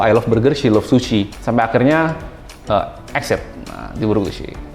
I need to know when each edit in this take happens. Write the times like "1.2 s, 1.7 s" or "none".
1.4 s